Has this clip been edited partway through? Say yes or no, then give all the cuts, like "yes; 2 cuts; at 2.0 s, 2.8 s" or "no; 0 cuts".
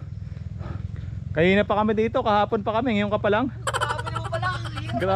no; 0 cuts